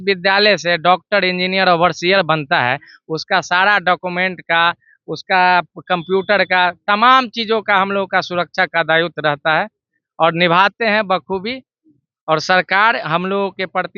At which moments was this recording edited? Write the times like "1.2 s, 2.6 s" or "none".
none